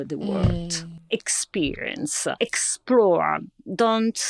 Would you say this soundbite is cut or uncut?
cut